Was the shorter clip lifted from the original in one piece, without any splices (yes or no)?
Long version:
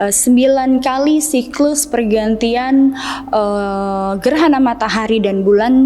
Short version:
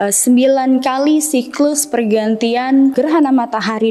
no